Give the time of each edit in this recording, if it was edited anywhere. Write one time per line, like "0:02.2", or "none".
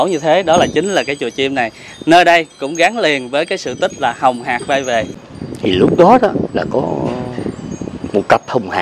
0:05.2